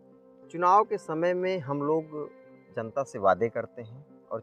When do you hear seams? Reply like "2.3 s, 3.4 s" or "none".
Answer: none